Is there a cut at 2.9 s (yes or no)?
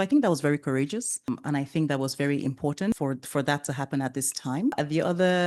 yes